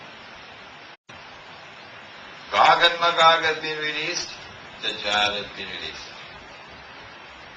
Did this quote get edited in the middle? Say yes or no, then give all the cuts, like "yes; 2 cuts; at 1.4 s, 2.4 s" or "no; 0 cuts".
no; 0 cuts